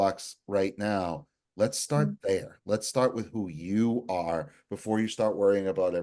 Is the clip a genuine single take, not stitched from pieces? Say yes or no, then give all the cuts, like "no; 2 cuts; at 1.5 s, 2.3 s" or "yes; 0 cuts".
yes; 0 cuts